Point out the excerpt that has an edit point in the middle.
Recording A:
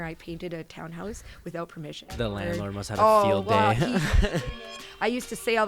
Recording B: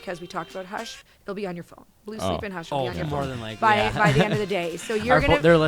A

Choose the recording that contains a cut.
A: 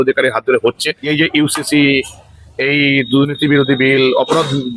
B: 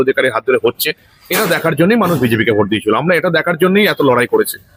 A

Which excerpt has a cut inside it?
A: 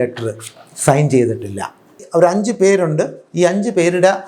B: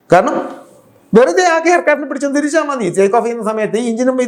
A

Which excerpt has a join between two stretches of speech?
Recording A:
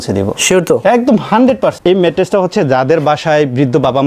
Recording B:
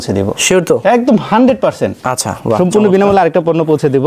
A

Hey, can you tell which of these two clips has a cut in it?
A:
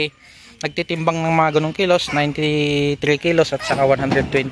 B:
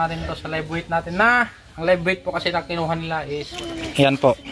B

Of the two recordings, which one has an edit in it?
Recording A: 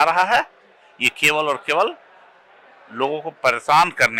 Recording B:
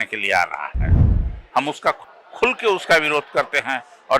B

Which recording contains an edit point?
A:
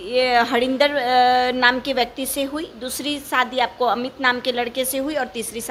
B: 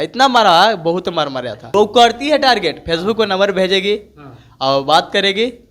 B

